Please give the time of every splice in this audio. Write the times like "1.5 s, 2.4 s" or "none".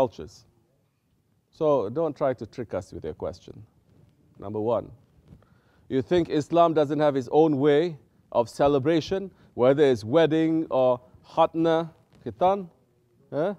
none